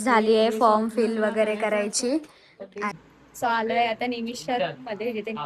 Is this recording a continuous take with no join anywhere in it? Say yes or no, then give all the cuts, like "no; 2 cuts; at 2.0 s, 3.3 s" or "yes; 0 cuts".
no; 1 cut; at 2.9 s